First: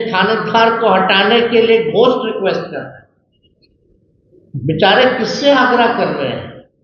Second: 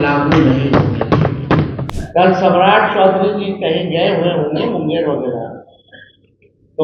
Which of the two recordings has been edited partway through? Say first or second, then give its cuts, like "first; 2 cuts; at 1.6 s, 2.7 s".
second; 1 cut; at 1.8 s